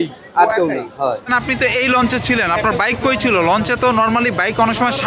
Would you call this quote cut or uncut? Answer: cut